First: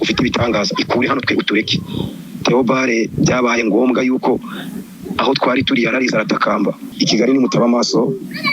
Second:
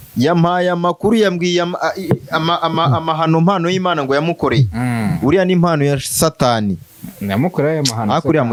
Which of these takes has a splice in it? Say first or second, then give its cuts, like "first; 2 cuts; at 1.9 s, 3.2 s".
first; 1 cut; at 6.8 s